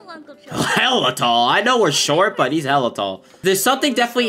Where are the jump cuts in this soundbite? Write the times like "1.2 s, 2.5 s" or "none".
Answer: 3.3 s

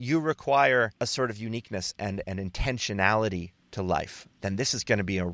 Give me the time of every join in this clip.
none

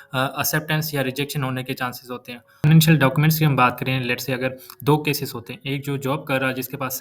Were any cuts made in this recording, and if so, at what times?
2.7 s

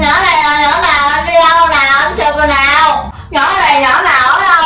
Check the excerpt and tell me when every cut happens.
3.2 s

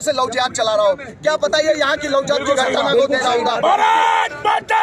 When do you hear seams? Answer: none

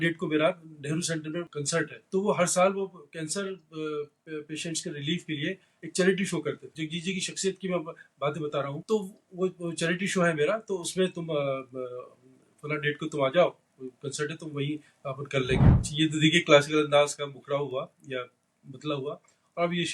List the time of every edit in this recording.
1.5 s, 6.7 s, 8.8 s, 15.8 s

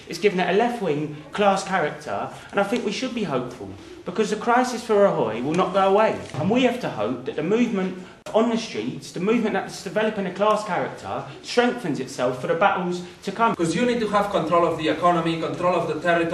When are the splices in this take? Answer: 6.3 s, 8.2 s, 13.5 s

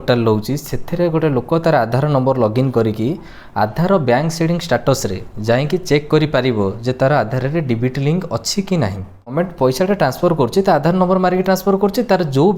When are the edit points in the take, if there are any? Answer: 9.3 s

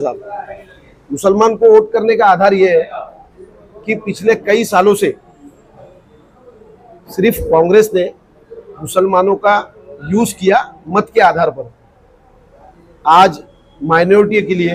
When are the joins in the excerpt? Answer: none

